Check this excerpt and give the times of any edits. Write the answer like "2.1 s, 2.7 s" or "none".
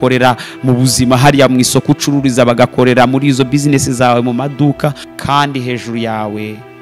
5.1 s

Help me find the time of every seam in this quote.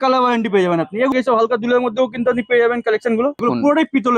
1.1 s, 3.4 s

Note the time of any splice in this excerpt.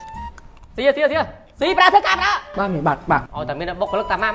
3.3 s

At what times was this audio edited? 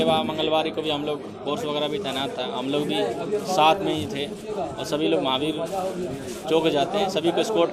none

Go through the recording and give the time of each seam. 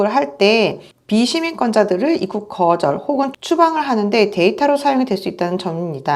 none

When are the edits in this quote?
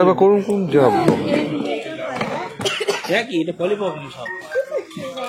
none

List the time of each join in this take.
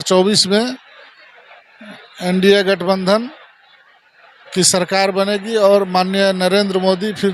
none

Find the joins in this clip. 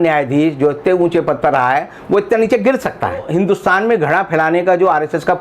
3.3 s

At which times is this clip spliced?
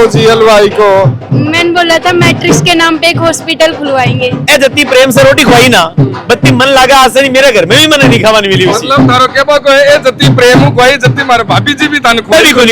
1.2 s, 4.4 s

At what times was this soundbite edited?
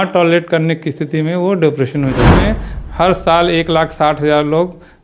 2.4 s

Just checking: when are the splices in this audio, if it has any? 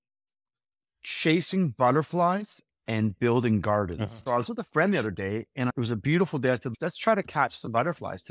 4.1 s, 5.7 s, 6.7 s

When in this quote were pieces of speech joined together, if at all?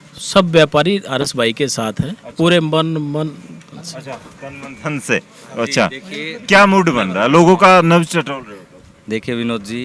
none

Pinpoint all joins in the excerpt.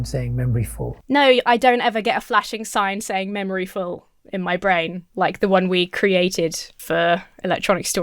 0.9 s

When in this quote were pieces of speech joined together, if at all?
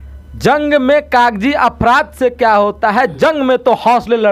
none

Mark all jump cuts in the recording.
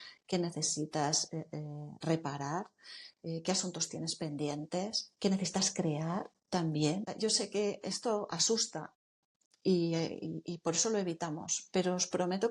7.1 s

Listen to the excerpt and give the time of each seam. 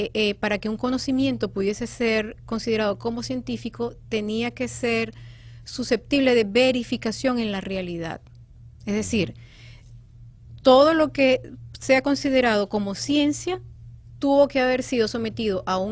none

